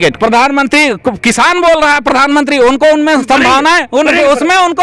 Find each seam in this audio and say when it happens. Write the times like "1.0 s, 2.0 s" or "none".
none